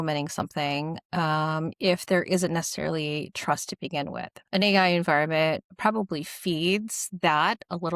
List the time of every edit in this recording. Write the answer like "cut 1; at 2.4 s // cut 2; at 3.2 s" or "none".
cut 1; at 4.3 s // cut 2; at 5.7 s